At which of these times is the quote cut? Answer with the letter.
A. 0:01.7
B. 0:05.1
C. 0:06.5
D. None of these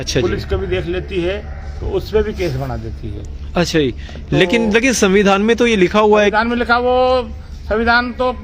D